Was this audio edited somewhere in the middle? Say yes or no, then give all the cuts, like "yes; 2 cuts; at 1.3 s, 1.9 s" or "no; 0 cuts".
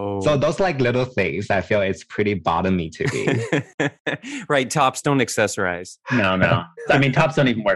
yes; 1 cut; at 6.9 s